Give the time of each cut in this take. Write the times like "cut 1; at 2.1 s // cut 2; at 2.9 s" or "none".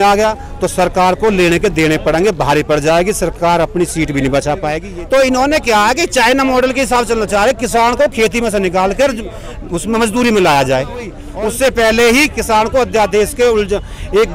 cut 1; at 4.8 s // cut 2; at 11.2 s